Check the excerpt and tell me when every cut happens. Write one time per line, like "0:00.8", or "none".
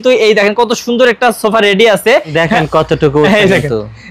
0:02.3